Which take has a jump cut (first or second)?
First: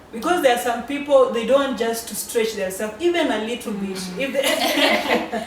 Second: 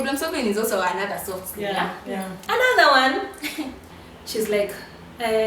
second